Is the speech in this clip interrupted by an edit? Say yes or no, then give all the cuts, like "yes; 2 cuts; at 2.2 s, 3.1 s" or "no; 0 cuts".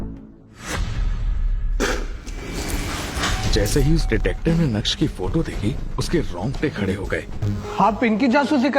yes; 1 cut; at 7.4 s